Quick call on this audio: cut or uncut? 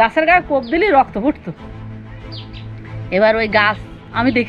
uncut